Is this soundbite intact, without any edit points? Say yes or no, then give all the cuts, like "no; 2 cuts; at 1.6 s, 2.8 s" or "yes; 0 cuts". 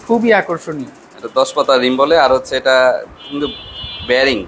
yes; 0 cuts